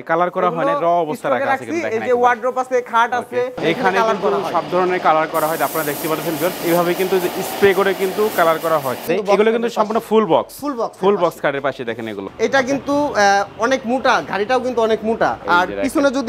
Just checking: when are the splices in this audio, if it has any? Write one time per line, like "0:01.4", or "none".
0:03.5
0:09.1
0:12.3